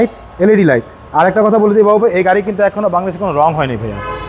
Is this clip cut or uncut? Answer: uncut